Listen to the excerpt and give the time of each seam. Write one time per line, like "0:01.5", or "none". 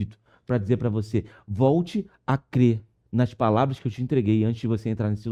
none